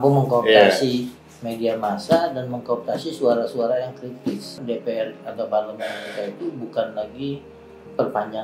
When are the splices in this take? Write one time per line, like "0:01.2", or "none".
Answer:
0:04.6